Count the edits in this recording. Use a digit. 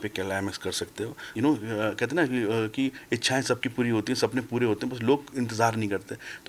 1